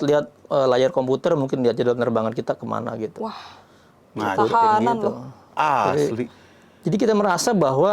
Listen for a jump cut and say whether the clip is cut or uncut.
uncut